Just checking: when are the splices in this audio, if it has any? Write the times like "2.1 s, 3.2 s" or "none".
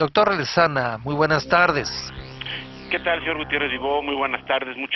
none